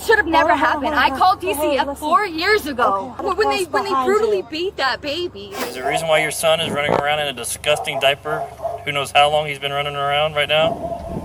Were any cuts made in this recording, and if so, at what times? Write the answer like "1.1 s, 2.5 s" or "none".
3.2 s, 5.6 s